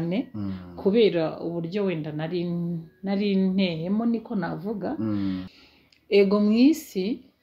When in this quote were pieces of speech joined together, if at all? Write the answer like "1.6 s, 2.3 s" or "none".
5.5 s